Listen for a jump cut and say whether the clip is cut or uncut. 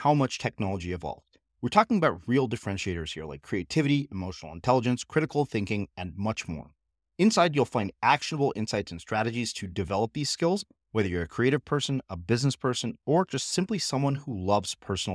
uncut